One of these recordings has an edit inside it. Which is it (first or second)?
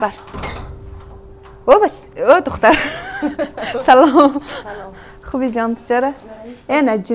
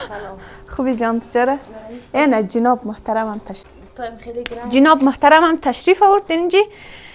second